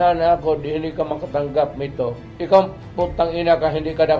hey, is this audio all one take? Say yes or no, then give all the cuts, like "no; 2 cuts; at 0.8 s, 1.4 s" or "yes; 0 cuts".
no; 1 cut; at 2.3 s